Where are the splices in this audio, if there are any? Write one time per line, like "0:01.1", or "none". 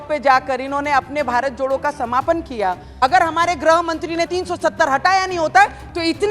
0:02.9
0:04.3